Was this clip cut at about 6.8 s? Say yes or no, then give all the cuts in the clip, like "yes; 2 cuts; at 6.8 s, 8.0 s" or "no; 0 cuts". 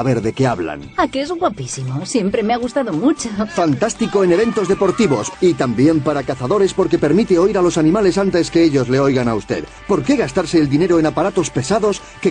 no; 2 cuts; at 5.3 s, 9.8 s